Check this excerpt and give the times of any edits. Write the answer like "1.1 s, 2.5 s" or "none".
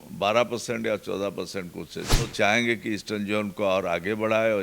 2.3 s